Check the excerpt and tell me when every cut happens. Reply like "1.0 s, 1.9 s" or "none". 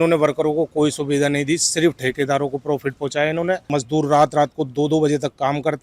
3.6 s